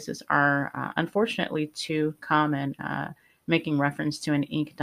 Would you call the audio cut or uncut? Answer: uncut